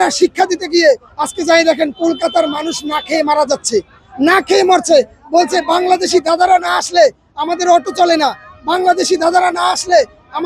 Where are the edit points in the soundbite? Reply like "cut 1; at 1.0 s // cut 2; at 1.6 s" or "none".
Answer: none